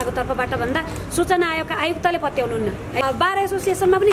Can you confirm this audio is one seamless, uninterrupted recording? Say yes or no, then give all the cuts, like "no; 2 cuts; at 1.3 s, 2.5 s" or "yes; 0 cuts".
no; 1 cut; at 3.0 s